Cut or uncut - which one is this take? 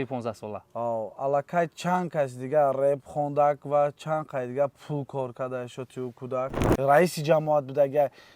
cut